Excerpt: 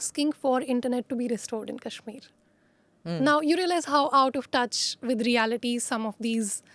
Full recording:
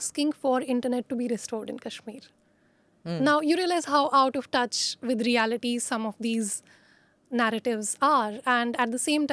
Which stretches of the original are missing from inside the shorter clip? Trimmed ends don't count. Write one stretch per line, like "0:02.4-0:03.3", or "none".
none

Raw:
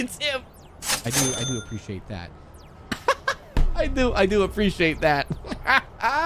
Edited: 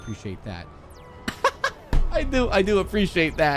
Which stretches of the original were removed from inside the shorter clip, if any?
none

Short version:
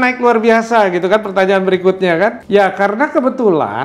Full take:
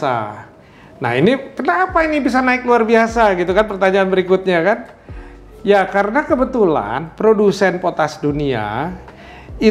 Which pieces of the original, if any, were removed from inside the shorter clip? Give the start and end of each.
0:04.9-0:05.6

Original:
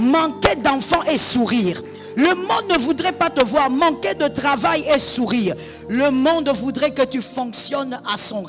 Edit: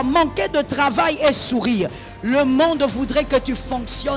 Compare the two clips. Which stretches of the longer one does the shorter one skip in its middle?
none

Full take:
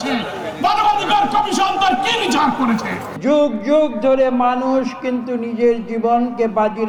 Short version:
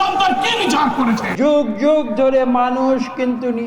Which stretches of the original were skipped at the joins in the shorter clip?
0:02.9-0:03.1

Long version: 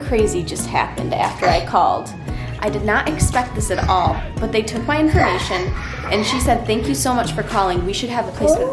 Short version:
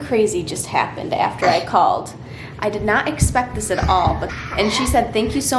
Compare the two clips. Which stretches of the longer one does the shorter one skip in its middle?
0:04.3-0:05.9

